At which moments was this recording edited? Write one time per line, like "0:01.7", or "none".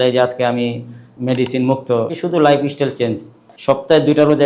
0:02.1
0:03.5